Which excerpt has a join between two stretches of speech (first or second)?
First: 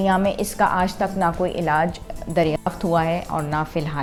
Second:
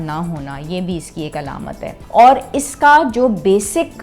second